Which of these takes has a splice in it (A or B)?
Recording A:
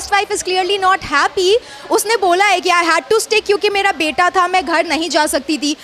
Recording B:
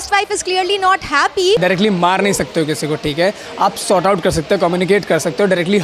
B